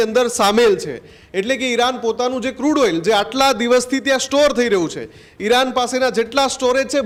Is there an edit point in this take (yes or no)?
no